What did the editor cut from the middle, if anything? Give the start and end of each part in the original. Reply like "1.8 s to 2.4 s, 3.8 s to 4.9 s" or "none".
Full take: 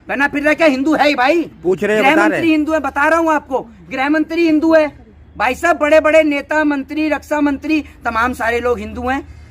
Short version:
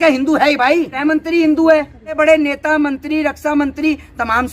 1.5 s to 4.0 s, 5.2 s to 6.0 s